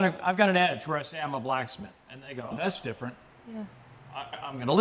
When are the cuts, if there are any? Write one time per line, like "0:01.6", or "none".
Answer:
0:02.5